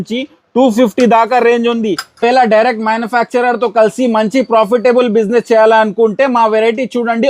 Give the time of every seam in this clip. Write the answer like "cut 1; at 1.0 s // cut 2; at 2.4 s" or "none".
cut 1; at 2.1 s